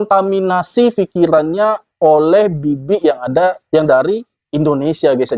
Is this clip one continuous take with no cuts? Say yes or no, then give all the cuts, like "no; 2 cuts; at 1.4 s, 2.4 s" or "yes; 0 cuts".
yes; 0 cuts